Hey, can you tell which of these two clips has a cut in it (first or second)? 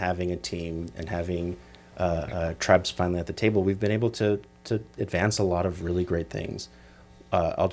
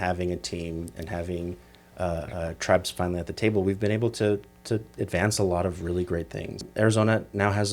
second